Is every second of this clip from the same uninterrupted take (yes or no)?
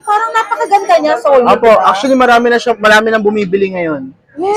yes